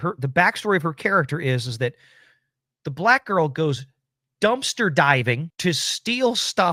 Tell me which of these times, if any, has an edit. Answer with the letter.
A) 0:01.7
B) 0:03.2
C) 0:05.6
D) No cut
D